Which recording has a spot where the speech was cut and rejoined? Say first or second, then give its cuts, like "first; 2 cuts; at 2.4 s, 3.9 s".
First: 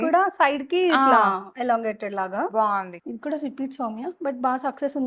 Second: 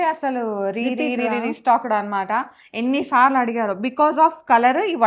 first; 1 cut; at 2.9 s